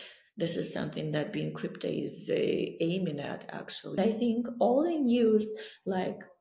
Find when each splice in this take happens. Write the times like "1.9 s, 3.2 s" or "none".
4.0 s